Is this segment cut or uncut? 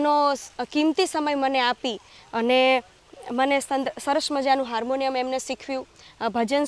uncut